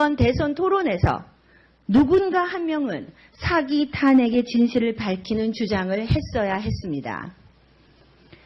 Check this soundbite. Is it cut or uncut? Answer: uncut